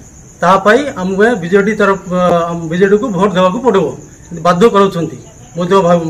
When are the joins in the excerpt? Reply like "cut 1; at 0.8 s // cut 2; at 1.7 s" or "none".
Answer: none